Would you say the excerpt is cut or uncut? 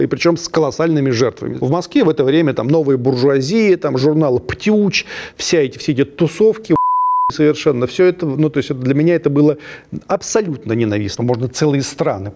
cut